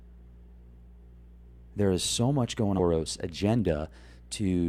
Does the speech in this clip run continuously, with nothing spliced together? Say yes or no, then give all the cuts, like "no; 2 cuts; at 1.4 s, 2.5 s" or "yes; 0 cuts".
yes; 0 cuts